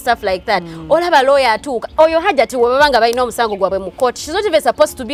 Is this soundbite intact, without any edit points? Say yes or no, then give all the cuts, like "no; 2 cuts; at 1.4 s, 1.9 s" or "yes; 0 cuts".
yes; 0 cuts